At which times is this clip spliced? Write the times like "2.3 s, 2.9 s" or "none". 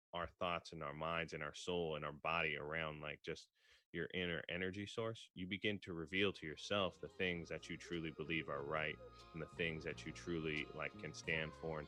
none

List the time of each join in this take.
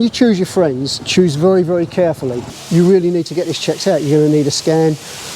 2.6 s

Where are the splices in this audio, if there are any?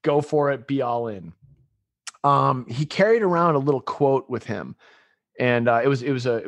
none

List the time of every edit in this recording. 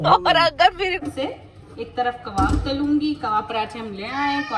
1.0 s

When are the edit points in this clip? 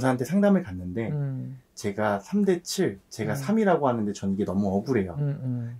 none

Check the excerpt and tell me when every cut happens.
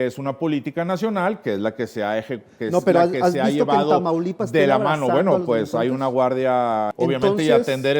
6.9 s

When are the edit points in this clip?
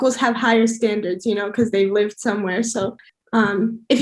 3.0 s

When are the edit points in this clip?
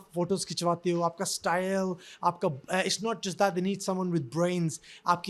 none

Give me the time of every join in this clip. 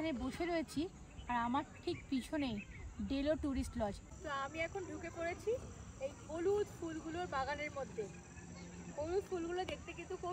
4.0 s

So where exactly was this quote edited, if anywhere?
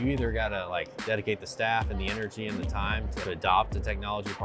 0.9 s, 3.1 s

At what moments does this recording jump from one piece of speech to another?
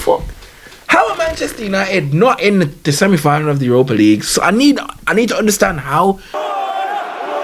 6.3 s

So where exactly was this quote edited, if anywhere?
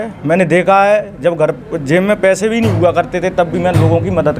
none

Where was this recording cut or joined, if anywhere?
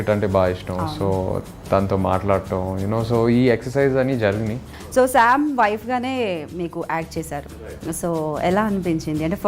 4.8 s

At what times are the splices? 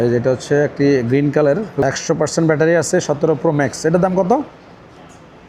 1.8 s

